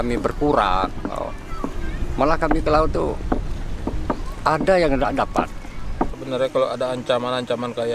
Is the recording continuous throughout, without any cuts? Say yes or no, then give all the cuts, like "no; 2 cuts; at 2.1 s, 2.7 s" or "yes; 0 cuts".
no; 1 cut; at 6.2 s